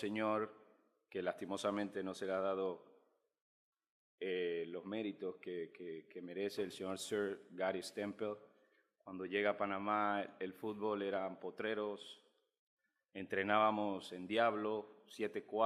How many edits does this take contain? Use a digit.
0